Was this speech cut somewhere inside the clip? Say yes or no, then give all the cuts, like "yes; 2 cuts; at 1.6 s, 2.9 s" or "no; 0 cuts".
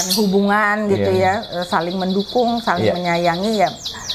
no; 0 cuts